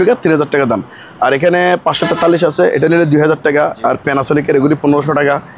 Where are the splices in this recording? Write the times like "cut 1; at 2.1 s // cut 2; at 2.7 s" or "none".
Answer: none